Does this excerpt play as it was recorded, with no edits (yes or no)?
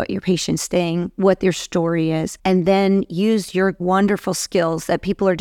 no